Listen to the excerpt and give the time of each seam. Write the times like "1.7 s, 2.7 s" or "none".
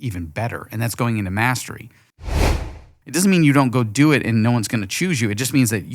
2.4 s